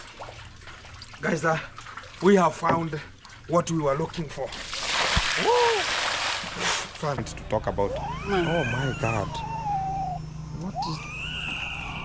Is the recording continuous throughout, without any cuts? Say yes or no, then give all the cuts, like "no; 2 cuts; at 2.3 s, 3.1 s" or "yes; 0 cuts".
no; 1 cut; at 7.2 s